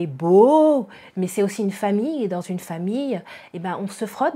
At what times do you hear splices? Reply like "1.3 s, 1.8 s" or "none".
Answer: none